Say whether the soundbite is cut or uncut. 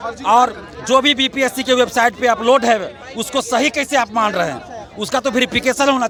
uncut